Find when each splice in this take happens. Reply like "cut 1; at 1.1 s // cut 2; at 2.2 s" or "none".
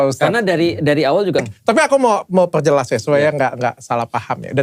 cut 1; at 1.4 s